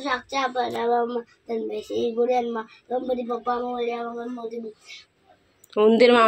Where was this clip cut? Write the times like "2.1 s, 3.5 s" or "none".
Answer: none